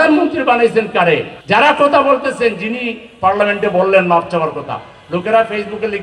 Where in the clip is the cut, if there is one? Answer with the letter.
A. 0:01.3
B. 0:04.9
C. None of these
A